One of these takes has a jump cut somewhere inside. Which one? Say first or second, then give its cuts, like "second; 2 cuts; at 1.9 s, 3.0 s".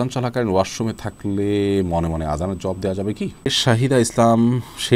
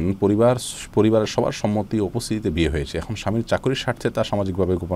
first; 1 cut; at 3.3 s